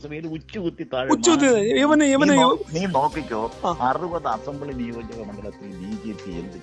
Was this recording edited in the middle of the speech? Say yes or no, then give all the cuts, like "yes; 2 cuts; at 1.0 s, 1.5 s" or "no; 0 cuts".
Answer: yes; 1 cut; at 1.8 s